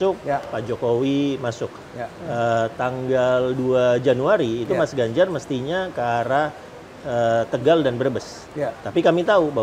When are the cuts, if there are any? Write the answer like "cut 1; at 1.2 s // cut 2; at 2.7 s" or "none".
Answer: none